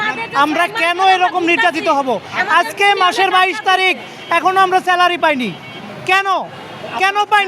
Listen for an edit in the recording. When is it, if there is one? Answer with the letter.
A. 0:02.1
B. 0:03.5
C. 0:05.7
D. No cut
D